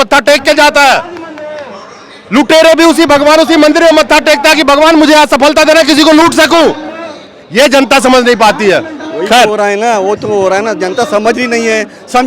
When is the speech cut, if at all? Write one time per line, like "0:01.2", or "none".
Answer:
none